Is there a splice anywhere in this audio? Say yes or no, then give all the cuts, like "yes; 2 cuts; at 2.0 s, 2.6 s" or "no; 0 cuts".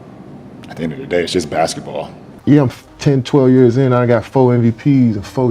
yes; 1 cut; at 2.3 s